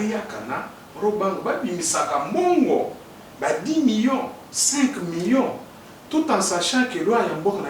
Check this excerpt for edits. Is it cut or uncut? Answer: uncut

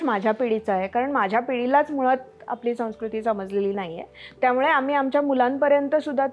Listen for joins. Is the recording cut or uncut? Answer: uncut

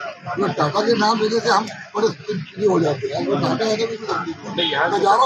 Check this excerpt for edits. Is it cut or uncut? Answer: uncut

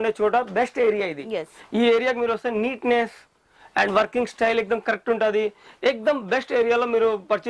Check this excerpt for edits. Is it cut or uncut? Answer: uncut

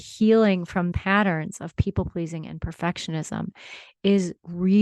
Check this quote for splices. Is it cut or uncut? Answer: cut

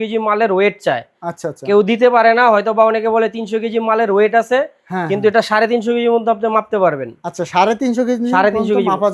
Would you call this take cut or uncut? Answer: uncut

